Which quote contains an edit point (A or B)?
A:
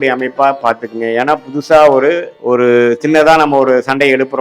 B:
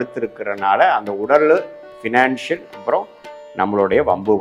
A